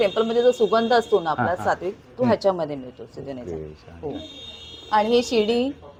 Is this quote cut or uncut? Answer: uncut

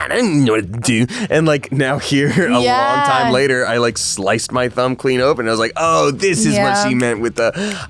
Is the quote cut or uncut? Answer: uncut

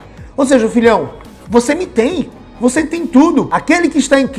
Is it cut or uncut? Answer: cut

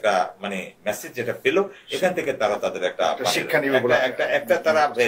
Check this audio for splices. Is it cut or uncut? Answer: uncut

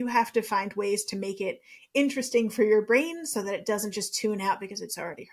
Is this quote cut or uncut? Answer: uncut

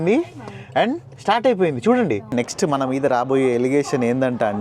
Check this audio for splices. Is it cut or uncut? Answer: cut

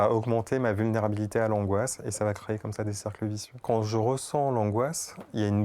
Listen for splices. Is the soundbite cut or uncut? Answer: cut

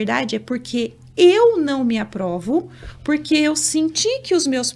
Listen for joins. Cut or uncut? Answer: uncut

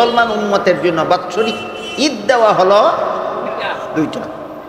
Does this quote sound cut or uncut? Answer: uncut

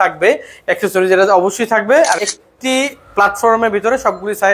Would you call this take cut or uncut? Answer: cut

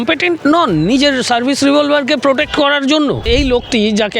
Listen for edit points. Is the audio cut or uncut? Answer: cut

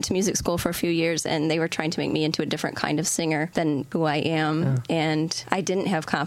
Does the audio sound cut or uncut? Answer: cut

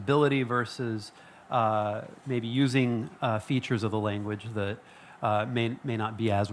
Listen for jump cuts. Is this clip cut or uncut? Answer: uncut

